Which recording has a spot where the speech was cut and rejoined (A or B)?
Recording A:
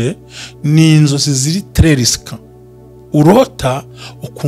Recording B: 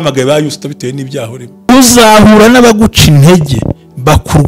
B